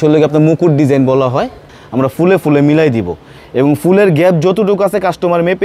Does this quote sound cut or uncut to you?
cut